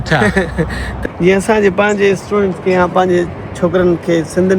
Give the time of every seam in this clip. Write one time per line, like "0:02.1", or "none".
0:00.9